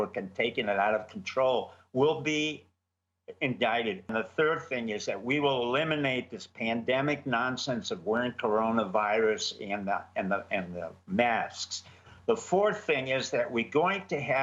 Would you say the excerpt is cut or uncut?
cut